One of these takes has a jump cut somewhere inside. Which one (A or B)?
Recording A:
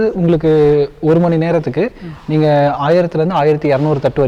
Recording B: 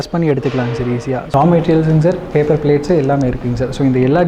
B